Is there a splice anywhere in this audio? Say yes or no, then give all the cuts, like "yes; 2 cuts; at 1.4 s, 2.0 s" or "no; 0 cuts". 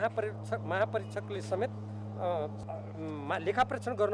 yes; 1 cut; at 2.6 s